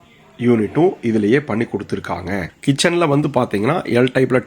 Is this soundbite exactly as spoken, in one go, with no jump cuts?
no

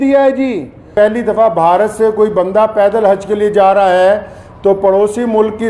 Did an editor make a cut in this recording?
yes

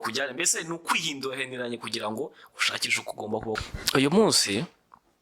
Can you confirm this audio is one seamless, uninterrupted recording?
no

